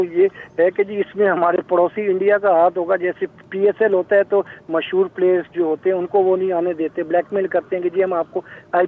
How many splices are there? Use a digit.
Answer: 0